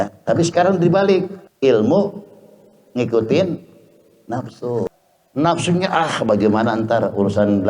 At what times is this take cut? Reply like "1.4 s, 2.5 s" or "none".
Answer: 1.4 s, 4.9 s